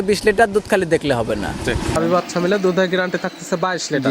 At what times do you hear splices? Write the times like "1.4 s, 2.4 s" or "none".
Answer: 2.0 s